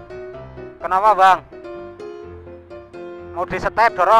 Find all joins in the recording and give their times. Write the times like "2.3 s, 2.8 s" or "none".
0.8 s, 1.5 s, 3.3 s